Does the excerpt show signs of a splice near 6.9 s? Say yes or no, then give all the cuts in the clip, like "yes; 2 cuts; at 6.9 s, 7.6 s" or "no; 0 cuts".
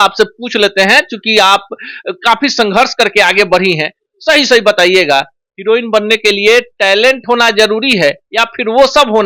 no; 0 cuts